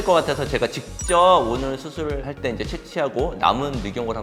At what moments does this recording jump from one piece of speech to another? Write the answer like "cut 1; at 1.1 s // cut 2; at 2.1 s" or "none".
none